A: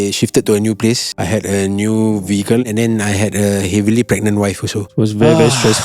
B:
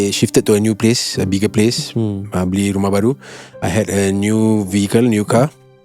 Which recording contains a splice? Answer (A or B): A